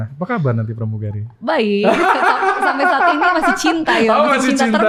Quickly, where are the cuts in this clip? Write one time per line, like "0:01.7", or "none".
none